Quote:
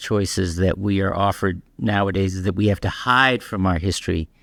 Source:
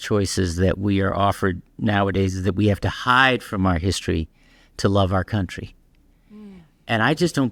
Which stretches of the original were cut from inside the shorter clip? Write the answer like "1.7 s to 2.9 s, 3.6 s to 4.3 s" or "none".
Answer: none